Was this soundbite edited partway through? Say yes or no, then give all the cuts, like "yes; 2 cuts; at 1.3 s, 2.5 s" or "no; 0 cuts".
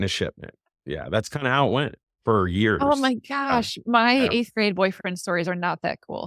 yes; 1 cut; at 2.0 s